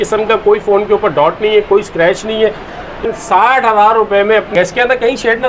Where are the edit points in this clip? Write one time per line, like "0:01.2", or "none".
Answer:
0:03.0
0:04.5